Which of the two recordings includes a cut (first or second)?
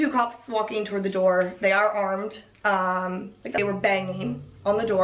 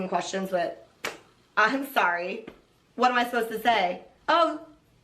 first